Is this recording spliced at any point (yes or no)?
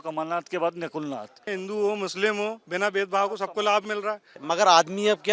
yes